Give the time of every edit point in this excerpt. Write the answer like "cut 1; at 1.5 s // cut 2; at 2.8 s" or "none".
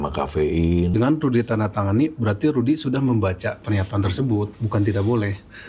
cut 1; at 0.9 s // cut 2; at 4.6 s

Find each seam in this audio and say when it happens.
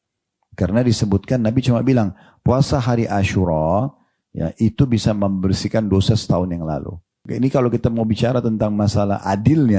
cut 1; at 7.2 s

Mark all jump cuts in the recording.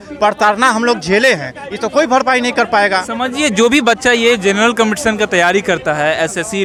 none

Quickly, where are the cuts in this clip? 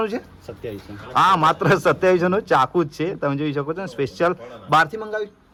none

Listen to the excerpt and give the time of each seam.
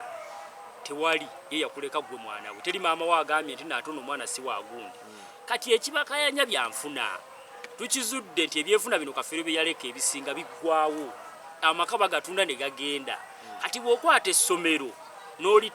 none

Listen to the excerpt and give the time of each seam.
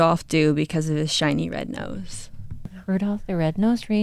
cut 1; at 2.7 s

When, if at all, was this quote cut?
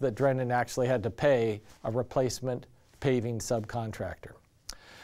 cut 1; at 1.7 s

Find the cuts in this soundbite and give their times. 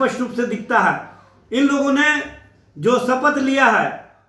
none

